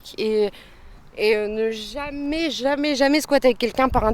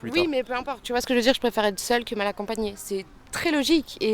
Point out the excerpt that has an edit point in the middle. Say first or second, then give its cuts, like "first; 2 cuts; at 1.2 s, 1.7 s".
second; 1 cut; at 2.8 s